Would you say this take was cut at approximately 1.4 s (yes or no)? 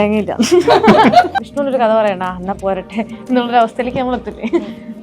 yes